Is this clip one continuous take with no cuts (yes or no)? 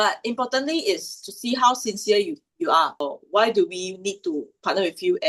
no